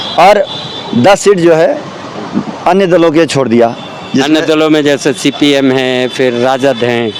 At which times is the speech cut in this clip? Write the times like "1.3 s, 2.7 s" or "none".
none